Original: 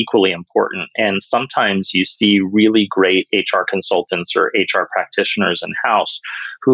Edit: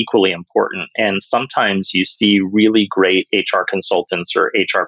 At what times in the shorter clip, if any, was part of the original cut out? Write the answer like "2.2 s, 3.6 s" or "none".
none